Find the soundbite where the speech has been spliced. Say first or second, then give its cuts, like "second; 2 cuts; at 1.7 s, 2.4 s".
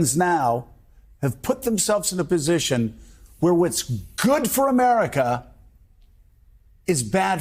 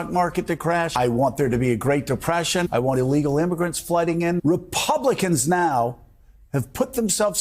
second; 3 cuts; at 0.9 s, 2.7 s, 4.4 s